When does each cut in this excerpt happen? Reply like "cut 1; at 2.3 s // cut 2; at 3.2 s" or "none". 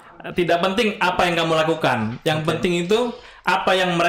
none

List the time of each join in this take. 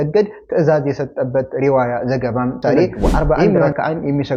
cut 1; at 2.6 s

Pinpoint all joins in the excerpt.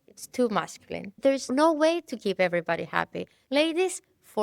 cut 1; at 1.5 s // cut 2; at 3.4 s

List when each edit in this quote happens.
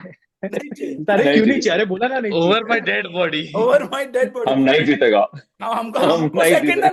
none

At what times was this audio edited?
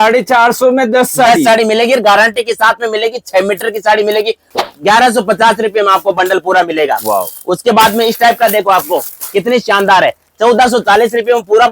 cut 1; at 4.5 s

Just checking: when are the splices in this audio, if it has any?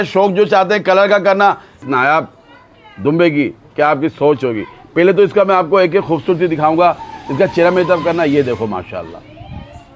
cut 1; at 1.8 s

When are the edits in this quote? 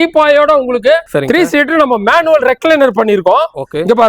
cut 1; at 1.1 s

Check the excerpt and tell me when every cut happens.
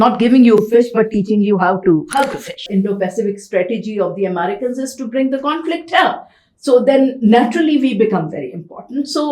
cut 1; at 2.6 s

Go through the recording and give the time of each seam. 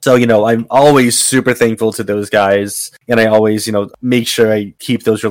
cut 1; at 3.9 s

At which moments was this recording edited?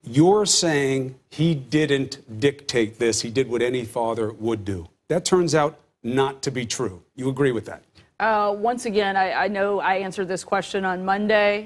cut 1; at 6.4 s

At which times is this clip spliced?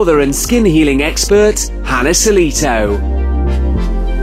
cut 1; at 3.1 s

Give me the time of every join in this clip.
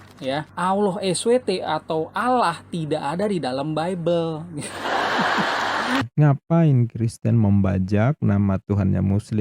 cut 1; at 6.1 s

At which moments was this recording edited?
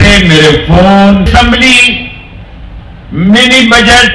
cut 1; at 1.3 s

